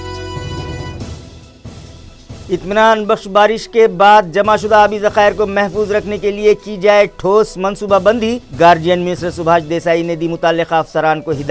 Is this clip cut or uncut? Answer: cut